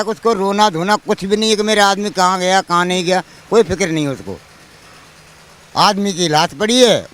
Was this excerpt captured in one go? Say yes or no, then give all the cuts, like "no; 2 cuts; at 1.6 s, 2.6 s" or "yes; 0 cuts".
yes; 0 cuts